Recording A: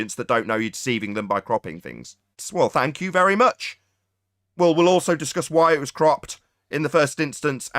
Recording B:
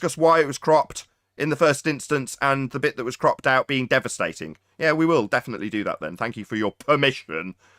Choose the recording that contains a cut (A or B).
A